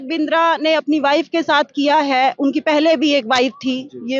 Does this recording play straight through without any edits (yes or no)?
yes